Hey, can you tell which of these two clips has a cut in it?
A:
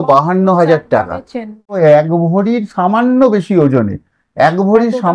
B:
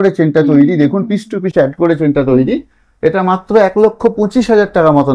A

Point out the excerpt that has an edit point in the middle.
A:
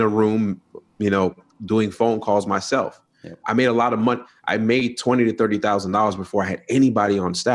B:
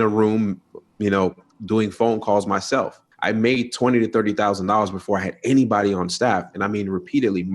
B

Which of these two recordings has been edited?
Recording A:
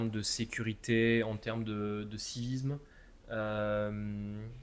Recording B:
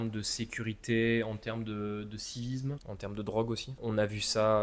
B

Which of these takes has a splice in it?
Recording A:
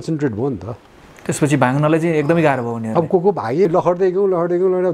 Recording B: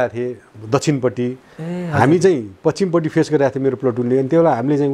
A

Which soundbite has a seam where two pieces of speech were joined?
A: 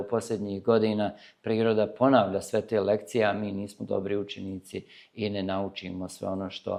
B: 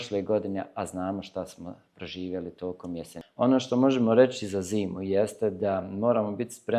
B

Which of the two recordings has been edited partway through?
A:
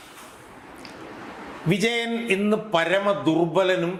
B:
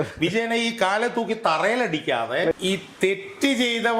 B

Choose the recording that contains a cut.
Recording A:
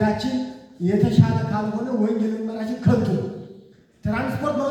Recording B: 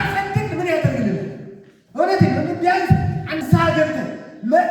B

